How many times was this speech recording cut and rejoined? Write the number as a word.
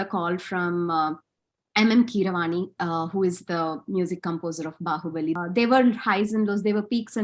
one